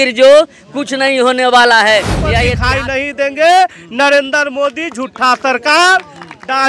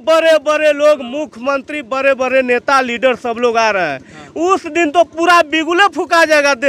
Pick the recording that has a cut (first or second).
first